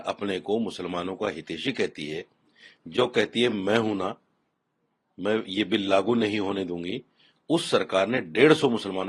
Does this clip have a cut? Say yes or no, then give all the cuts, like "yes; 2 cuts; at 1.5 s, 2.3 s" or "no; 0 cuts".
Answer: no; 0 cuts